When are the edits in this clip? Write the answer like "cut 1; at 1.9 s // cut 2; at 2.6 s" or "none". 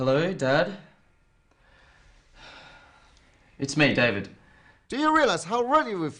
none